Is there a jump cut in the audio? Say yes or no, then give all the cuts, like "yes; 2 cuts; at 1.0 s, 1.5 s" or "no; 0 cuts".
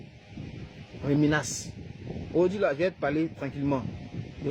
no; 0 cuts